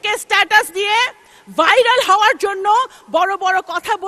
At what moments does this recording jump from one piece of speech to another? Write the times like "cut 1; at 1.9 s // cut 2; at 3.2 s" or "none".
none